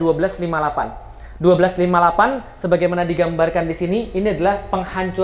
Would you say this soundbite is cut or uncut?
uncut